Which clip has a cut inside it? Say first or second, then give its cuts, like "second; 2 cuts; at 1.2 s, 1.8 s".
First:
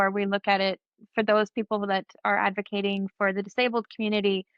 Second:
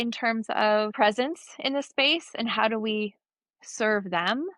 second; 1 cut; at 0.9 s